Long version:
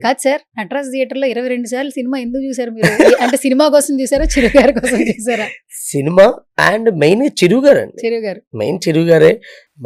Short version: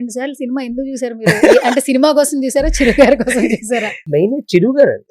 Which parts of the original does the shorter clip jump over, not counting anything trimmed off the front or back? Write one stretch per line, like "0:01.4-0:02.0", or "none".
0:05.6-0:07.0